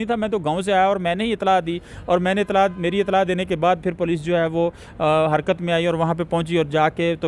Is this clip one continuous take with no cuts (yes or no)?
yes